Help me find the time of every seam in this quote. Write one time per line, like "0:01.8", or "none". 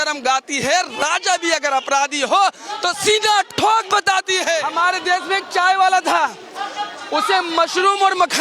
0:04.7